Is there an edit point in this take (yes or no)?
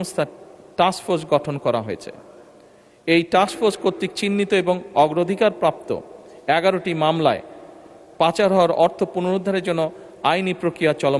no